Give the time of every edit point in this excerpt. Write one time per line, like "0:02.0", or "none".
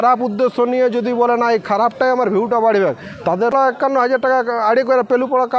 0:03.5